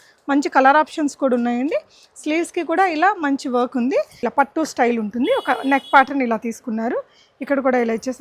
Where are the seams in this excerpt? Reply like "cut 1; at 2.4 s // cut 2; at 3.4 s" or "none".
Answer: cut 1; at 4.2 s